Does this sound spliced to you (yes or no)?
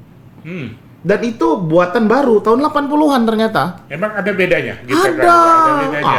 no